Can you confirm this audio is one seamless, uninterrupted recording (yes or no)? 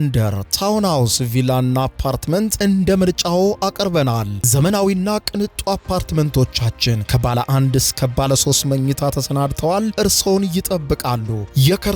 yes